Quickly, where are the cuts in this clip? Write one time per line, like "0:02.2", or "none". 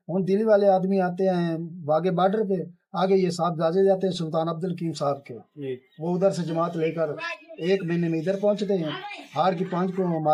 none